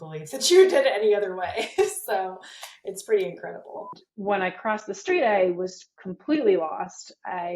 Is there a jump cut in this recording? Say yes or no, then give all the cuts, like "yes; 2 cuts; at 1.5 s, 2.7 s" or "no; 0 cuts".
yes; 1 cut; at 4.0 s